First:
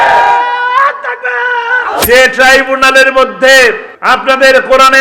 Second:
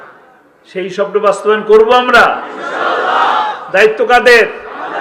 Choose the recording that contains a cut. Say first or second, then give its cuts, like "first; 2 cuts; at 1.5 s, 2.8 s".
first; 2 cuts; at 2.0 s, 3.9 s